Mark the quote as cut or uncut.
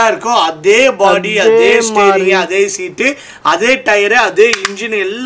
uncut